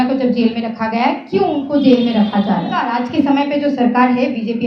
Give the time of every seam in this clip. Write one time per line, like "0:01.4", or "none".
0:03.0

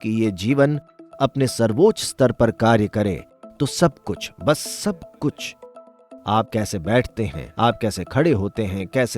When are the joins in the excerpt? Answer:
none

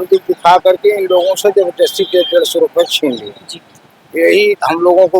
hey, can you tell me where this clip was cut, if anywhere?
none

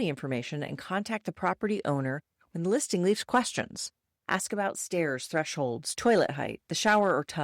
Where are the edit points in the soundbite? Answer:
0:05.9

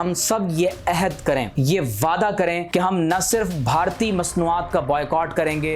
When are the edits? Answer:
0:01.5
0:02.6

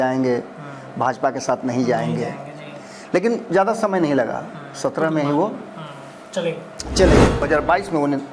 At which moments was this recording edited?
0:07.4

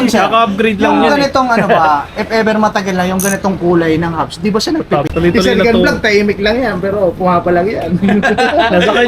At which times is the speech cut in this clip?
0:05.1

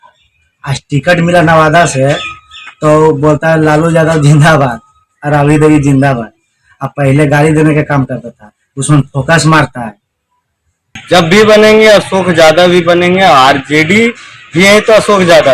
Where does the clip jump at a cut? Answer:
0:11.0

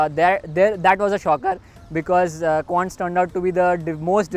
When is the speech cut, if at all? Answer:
none

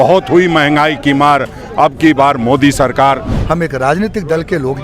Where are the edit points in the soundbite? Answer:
0:03.3

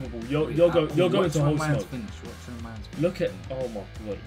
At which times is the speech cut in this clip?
none

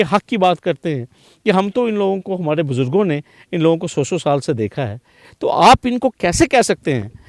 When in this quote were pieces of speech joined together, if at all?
none

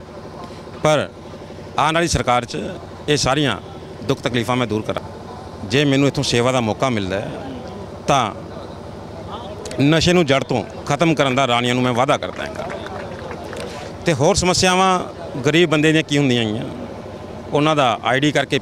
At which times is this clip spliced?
0:05.0

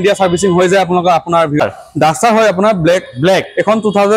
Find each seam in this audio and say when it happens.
0:01.6

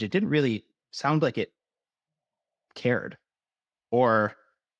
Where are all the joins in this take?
none

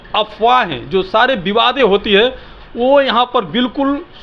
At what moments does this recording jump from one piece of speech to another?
none

